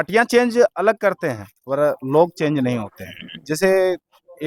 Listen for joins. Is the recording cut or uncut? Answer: uncut